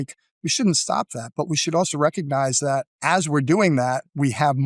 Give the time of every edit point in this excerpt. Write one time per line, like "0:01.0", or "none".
0:02.9